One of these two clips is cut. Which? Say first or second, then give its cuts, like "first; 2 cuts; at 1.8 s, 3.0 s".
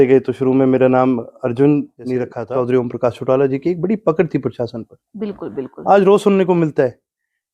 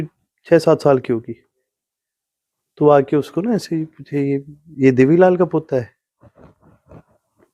first; 1 cut; at 2.3 s